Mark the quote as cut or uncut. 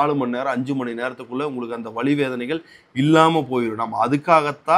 uncut